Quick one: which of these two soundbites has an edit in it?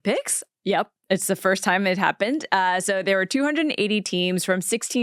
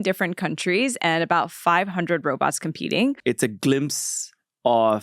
second; 1 cut; at 3.2 s

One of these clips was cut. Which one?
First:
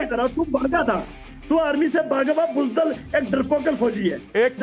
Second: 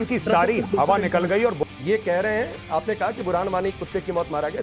second; 1 cut; at 1.6 s

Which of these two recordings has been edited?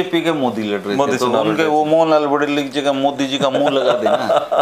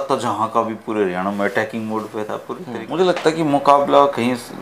second; 1 cut; at 2.8 s

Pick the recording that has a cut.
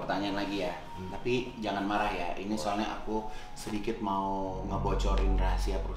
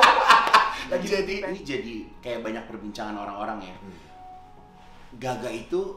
second; 1 cut; at 1.3 s

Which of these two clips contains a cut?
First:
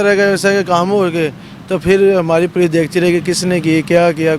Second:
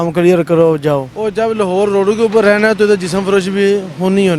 second; 1 cut; at 1.2 s

